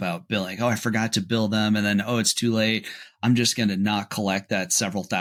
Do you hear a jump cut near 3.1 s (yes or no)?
no